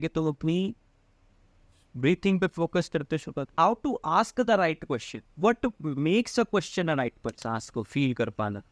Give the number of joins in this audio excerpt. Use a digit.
2